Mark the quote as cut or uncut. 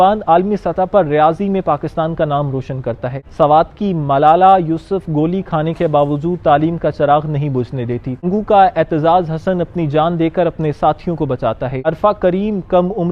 cut